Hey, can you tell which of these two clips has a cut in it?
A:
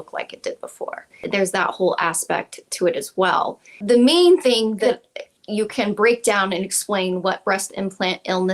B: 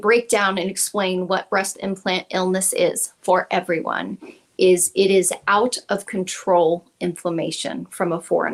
A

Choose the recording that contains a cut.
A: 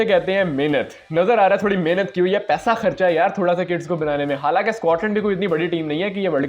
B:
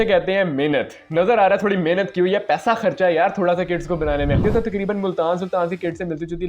B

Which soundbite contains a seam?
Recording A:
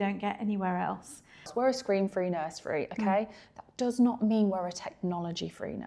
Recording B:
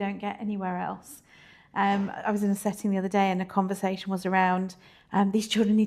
A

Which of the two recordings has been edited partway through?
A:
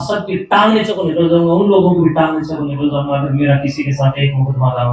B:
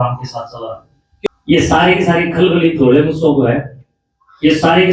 B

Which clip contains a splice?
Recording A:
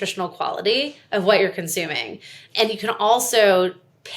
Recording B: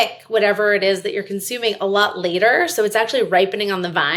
A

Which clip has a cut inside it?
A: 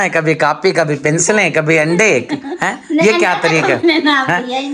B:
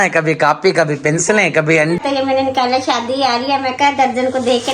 B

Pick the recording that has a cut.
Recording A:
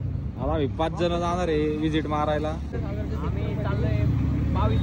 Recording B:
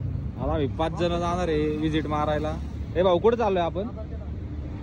A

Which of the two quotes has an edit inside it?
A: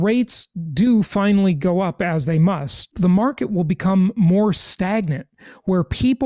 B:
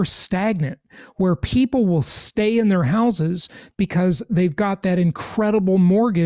A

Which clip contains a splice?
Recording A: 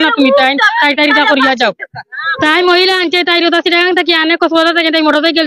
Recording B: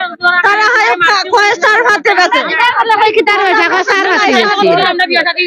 A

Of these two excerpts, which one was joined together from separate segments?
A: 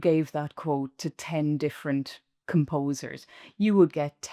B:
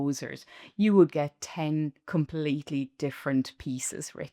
A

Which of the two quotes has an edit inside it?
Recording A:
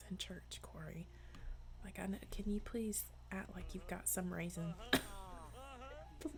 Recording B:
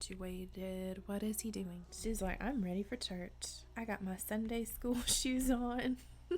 B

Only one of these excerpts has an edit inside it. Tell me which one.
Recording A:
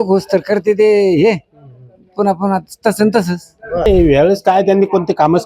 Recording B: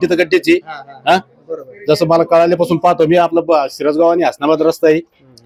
A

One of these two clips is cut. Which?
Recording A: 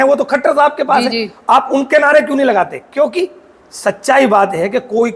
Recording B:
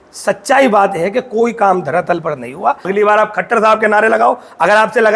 B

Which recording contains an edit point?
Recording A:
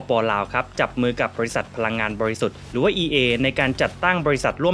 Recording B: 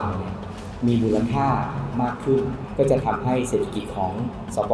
B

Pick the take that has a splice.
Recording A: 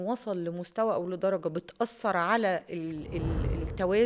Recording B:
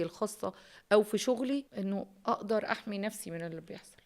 B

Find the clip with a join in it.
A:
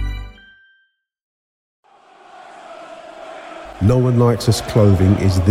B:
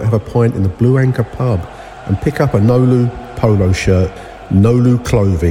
A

